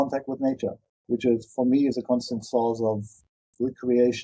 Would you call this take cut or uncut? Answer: uncut